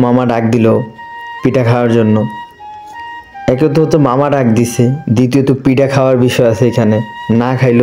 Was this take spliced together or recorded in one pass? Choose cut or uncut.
uncut